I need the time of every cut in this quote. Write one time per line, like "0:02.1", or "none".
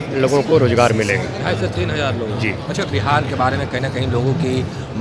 none